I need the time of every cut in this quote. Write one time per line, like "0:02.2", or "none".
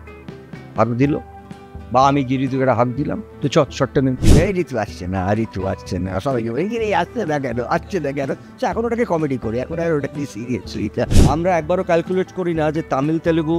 0:04.2
0:11.2